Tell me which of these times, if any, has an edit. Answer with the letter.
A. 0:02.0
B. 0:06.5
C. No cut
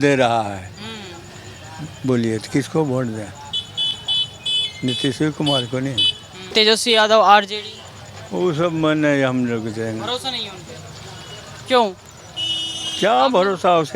B